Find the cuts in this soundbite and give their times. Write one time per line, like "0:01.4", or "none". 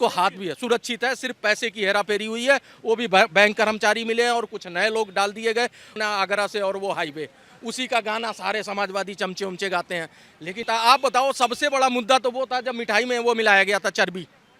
0:05.9
0:10.6